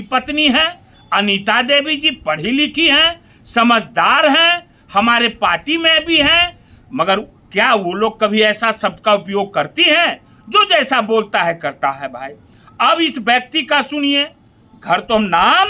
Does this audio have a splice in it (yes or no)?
no